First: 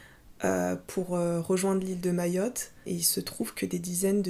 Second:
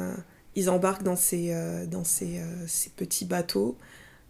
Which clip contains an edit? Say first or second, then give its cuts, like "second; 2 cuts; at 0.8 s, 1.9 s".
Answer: first; 1 cut; at 2.7 s